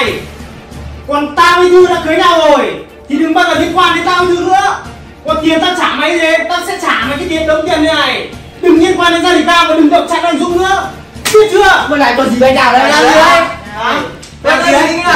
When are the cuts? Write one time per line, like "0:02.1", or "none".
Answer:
0:13.6